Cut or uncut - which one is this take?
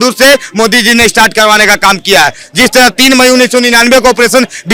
uncut